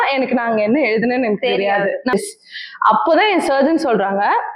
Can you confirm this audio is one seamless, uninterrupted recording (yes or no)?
no